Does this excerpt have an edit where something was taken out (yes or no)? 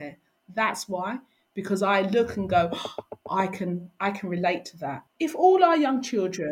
yes